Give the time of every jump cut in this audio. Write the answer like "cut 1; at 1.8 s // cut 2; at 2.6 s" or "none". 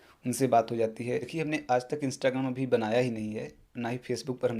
cut 1; at 1.3 s